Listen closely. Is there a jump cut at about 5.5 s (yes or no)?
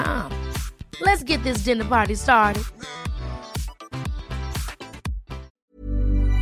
yes